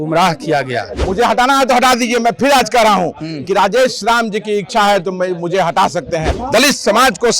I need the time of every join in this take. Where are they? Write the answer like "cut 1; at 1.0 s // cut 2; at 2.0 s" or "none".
cut 1; at 0.9 s // cut 2; at 6.4 s